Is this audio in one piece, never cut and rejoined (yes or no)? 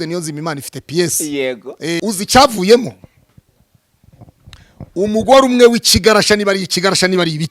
no